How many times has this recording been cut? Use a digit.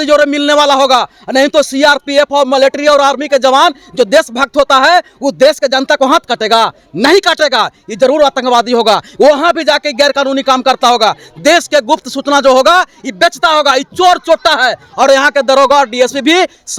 0